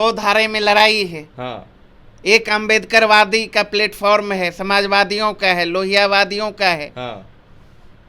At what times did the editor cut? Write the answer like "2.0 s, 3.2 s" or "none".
none